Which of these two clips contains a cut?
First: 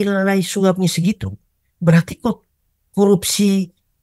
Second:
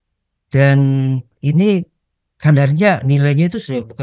second; 1 cut; at 1.3 s

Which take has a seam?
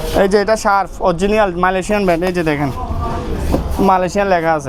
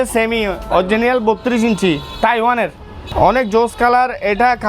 second; 1 cut; at 3.1 s

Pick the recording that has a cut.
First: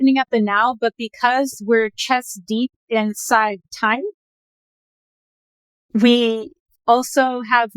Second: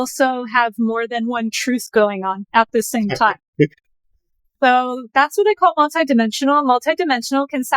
second; 1 cut; at 2.4 s

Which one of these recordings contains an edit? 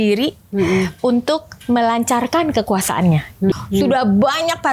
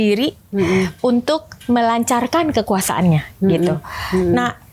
first; 1 cut; at 3.5 s

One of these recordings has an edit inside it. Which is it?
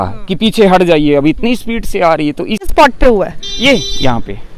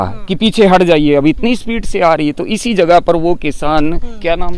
first; 1 cut; at 2.7 s

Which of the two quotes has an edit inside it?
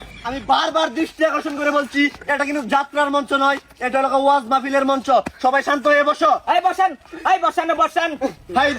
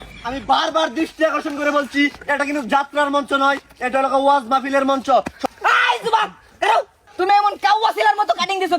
second; 2 cuts; at 5.4 s, 7.1 s

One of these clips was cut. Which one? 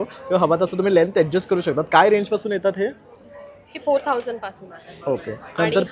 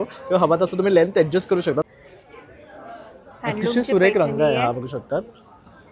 second; 1 cut; at 1.9 s

